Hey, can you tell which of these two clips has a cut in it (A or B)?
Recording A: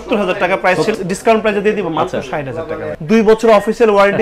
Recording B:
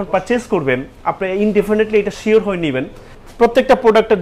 A